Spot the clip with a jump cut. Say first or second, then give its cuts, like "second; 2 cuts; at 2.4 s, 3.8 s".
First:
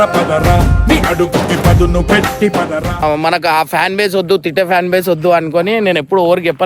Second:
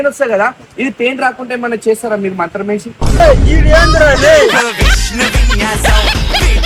first; 1 cut; at 3.0 s